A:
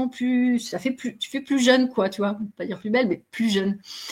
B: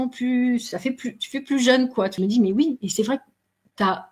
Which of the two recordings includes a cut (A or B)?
B